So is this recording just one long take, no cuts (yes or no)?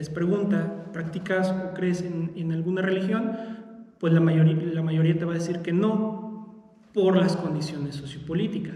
yes